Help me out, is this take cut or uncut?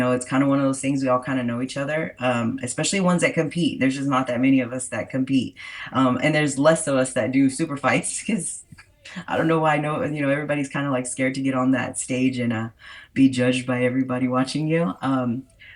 uncut